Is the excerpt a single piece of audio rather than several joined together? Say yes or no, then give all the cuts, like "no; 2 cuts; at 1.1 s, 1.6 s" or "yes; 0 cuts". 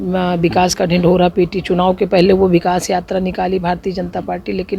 yes; 0 cuts